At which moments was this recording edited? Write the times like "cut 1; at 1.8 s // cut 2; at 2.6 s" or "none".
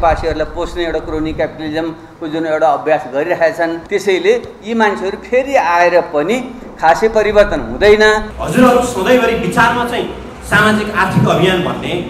cut 1; at 3.8 s // cut 2; at 8.3 s